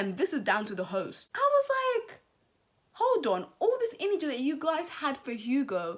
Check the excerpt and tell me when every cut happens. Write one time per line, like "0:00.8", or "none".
0:01.2